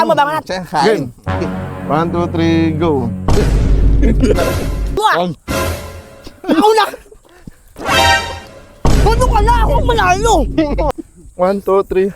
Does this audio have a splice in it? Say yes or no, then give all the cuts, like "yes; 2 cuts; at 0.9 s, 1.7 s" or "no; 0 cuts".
yes; 2 cuts; at 5.0 s, 10.9 s